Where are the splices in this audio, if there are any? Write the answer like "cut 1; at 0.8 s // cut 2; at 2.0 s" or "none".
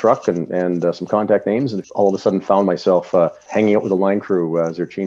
cut 1; at 1.8 s // cut 2; at 3.4 s